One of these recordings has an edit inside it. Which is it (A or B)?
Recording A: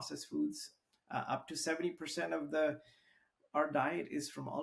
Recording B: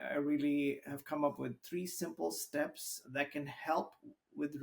B